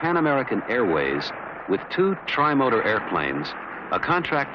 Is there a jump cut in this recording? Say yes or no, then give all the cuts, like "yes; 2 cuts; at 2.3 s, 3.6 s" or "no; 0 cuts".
yes; 1 cut; at 3.1 s